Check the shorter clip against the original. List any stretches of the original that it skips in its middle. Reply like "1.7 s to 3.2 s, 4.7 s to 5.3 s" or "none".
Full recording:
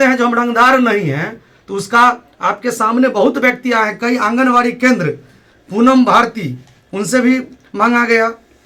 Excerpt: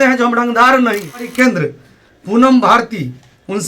1.3 s to 4.7 s